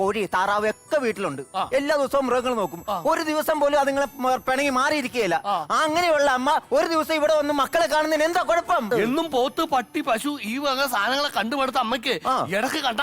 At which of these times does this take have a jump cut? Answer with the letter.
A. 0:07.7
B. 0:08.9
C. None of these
B